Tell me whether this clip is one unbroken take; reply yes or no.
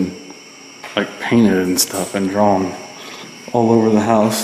yes